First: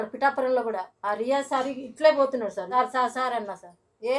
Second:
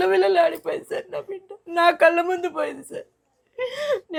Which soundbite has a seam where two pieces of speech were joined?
first; 2 cuts; at 0.9 s, 2.7 s

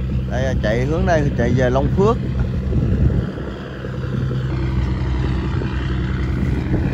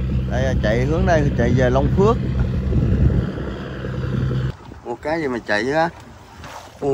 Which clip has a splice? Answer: second; 1 cut; at 4.5 s

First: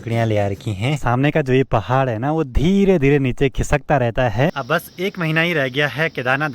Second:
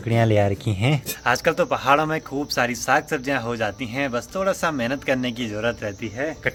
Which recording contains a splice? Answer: first; 2 cuts; at 1.0 s, 4.5 s

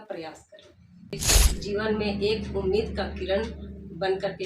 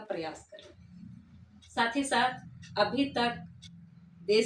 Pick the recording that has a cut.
first; 1 cut; at 1.3 s

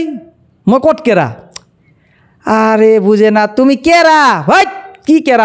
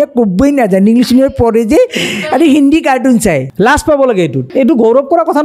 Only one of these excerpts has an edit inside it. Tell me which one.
second; 2 cuts; at 3.5 s, 4.5 s

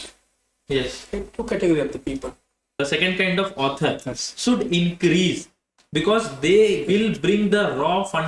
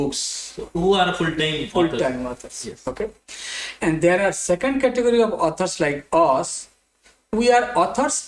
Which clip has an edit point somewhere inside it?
first; 1 cut; at 2.8 s

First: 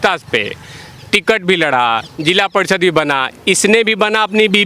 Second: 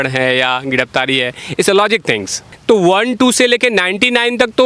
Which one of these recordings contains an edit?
second; 1 cut; at 2.3 s

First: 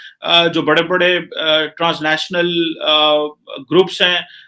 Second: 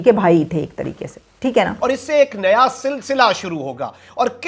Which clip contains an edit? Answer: second; 1 cut; at 1.7 s

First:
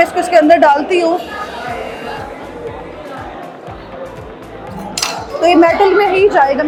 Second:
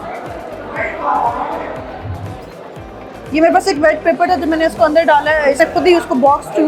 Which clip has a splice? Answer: second; 1 cut; at 5.4 s

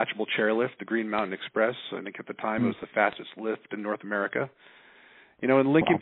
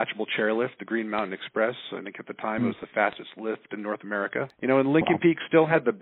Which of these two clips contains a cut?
second; 1 cut; at 4.5 s

